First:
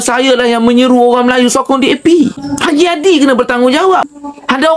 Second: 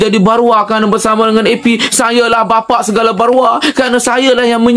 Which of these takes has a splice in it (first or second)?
first